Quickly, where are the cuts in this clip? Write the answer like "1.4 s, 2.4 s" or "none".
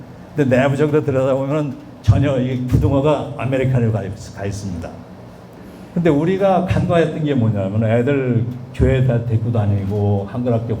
5.5 s